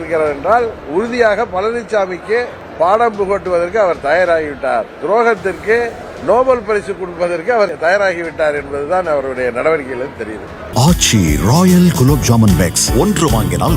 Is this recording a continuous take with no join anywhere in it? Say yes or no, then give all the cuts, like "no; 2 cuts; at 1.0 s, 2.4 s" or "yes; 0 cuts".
no; 4 cuts; at 2.6 s, 6.1 s, 7.7 s, 10.6 s